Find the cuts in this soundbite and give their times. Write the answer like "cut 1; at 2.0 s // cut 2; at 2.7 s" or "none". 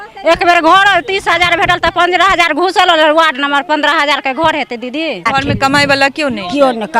cut 1; at 5.3 s